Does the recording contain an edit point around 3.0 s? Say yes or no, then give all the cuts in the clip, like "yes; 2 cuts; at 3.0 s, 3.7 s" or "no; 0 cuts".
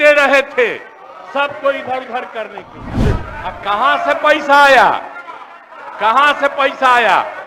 yes; 1 cut; at 3.0 s